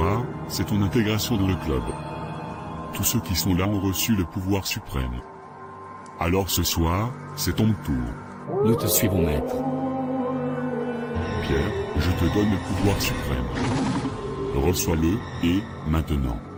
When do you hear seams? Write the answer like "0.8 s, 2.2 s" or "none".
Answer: none